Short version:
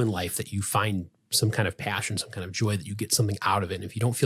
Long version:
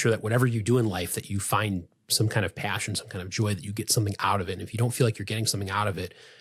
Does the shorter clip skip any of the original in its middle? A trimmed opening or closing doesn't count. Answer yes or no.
no